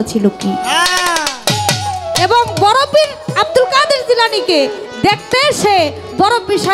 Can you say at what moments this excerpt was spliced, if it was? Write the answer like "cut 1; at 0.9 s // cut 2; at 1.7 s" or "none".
none